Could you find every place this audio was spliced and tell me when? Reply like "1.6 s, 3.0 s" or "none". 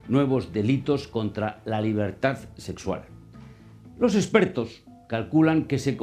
2.5 s